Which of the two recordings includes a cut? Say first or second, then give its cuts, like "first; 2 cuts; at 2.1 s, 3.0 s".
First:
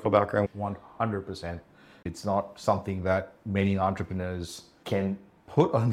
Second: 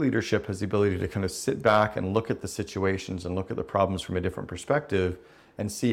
first; 1 cut; at 2.0 s